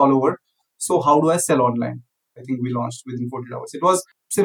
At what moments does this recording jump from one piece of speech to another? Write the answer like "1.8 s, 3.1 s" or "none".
2.3 s